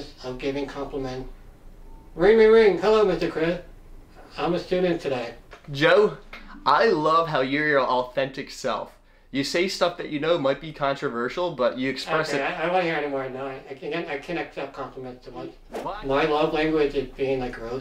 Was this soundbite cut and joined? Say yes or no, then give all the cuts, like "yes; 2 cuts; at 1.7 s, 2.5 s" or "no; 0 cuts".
yes; 1 cut; at 15.7 s